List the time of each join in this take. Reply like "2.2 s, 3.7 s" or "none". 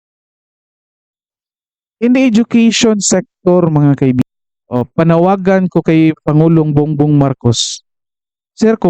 4.2 s

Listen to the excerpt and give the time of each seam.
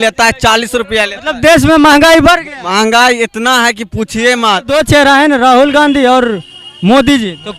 4.7 s

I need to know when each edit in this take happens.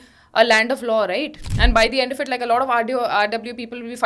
1.5 s

